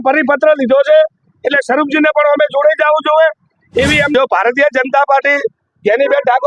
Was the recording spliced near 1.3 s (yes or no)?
no